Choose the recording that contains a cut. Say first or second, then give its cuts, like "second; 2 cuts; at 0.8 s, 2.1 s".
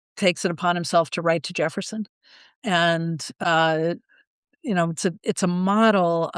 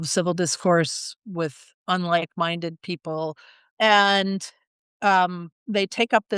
second; 1 cut; at 3.7 s